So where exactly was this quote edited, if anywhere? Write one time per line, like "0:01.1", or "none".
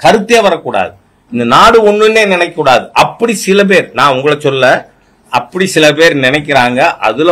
none